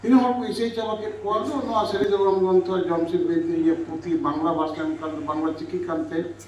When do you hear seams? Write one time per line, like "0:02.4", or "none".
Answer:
0:01.6